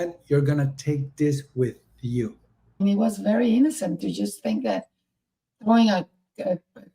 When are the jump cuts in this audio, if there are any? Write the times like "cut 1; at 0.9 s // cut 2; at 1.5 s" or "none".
cut 1; at 2.8 s